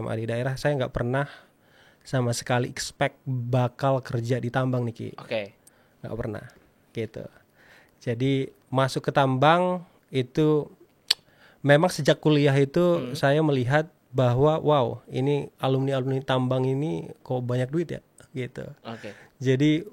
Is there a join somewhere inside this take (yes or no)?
no